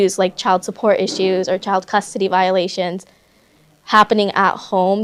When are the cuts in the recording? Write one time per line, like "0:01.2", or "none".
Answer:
none